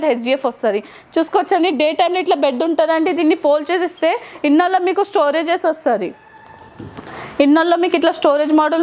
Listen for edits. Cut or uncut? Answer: uncut